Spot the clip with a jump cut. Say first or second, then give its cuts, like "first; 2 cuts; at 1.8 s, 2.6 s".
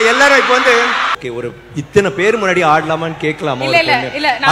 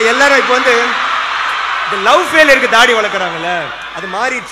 first; 1 cut; at 1.2 s